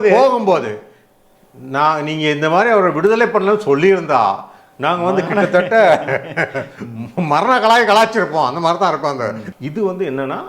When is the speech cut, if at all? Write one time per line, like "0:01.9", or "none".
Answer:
0:09.4